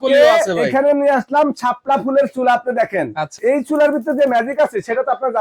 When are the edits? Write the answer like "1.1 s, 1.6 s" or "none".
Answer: 3.4 s